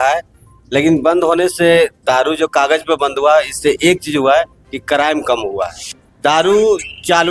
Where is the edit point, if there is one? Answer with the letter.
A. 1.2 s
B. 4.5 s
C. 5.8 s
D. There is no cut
C